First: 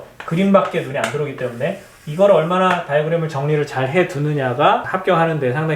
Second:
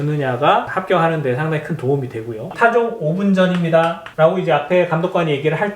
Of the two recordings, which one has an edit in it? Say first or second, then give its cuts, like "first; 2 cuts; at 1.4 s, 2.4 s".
second; 2 cuts; at 2.5 s, 4.0 s